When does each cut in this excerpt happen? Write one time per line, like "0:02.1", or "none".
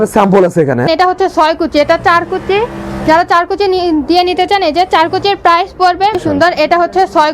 0:00.9
0:06.2